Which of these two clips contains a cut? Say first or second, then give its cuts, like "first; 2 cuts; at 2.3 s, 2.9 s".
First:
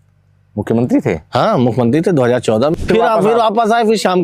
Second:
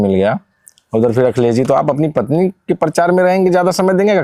first; 1 cut; at 2.8 s